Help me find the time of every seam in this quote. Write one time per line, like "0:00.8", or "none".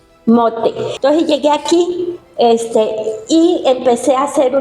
0:00.9